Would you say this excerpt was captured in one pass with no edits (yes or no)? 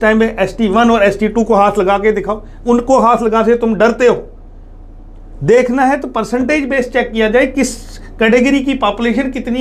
yes